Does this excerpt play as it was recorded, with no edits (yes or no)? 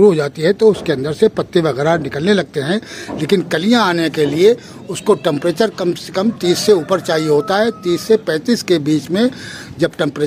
yes